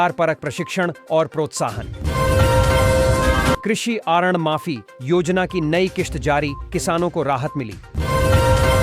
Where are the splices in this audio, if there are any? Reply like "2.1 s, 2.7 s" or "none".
1.9 s, 3.6 s, 7.9 s